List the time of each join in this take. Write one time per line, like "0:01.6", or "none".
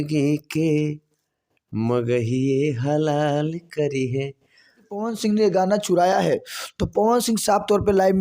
0:05.1